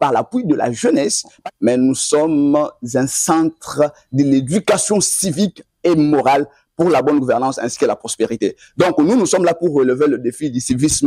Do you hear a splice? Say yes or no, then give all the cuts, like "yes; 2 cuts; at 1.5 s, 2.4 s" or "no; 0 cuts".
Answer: yes; 1 cut; at 1.3 s